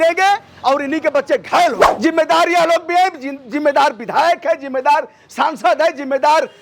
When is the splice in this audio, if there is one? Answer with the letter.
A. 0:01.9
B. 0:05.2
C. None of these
A